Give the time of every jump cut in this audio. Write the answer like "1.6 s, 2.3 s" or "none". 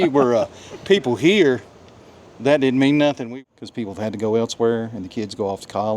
3.2 s